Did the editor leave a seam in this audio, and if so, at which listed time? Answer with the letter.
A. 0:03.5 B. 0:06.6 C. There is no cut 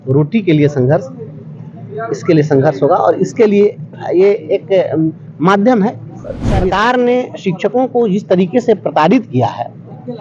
B